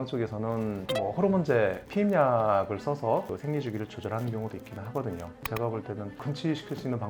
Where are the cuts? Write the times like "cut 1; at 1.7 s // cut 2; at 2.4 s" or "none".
none

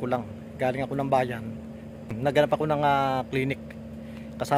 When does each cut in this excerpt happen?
cut 1; at 2.1 s

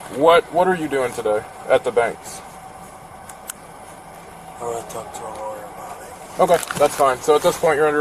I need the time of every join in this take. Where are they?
none

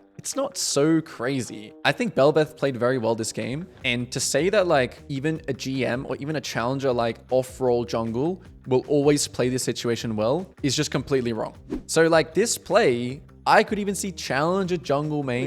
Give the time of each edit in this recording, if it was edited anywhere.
cut 1; at 10.5 s // cut 2; at 11.7 s

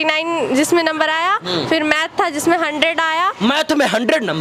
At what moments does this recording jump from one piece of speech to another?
none

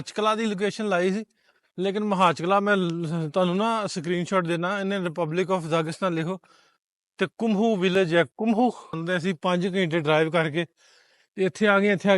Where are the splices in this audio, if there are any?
cut 1; at 9.0 s

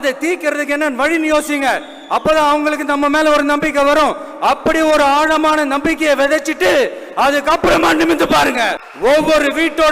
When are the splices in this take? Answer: cut 1; at 8.8 s

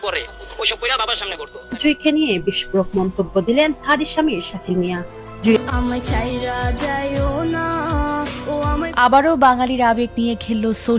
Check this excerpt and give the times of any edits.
cut 1; at 5.6 s

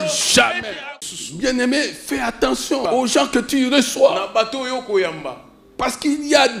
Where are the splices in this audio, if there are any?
cut 1; at 0.9 s // cut 2; at 2.8 s

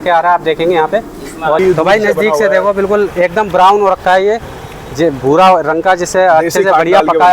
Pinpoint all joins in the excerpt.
cut 1; at 1.6 s

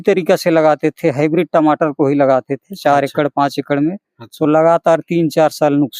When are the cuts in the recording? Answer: none

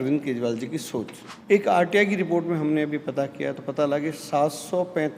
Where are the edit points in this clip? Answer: cut 1; at 1.2 s

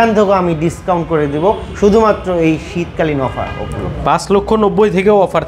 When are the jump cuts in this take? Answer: none

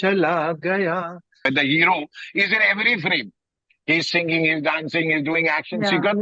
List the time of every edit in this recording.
cut 1; at 1.4 s

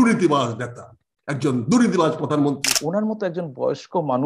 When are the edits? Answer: cut 1; at 2.7 s

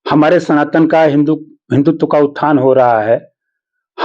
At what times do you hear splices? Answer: none

